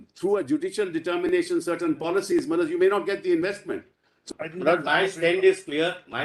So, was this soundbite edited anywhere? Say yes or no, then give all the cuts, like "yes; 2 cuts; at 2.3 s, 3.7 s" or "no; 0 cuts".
yes; 1 cut; at 4.2 s